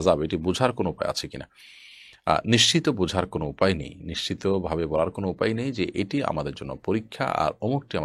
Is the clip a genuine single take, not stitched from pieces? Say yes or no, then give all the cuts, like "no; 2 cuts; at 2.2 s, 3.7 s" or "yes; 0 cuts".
yes; 0 cuts